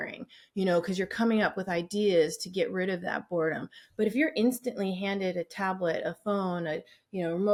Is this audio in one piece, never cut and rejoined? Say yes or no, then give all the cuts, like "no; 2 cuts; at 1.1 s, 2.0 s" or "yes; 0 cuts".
yes; 0 cuts